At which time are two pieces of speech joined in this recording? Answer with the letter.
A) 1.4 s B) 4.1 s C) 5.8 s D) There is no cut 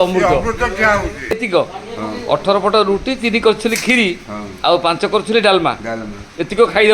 A